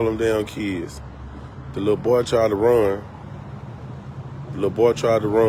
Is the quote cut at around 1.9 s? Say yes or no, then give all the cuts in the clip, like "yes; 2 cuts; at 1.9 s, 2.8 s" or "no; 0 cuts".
no; 0 cuts